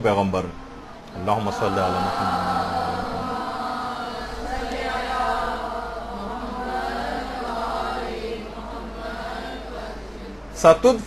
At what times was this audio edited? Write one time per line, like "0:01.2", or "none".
0:07.1